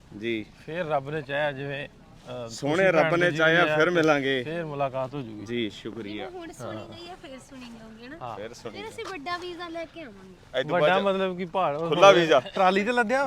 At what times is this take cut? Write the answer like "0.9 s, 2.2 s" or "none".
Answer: none